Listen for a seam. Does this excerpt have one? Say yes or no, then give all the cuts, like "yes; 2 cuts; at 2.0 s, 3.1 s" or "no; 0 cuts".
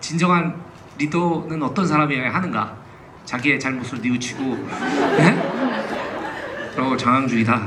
no; 0 cuts